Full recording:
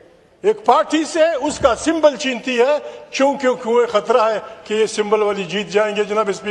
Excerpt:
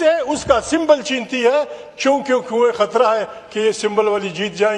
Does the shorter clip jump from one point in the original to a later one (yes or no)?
no